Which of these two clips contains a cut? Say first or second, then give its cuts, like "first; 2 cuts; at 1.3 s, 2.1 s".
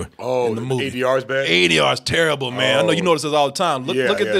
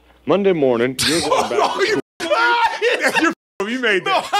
second; 1 cut; at 0.9 s